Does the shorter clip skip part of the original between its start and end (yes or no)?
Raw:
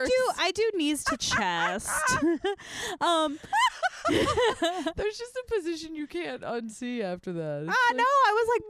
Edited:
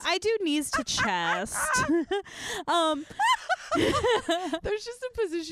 no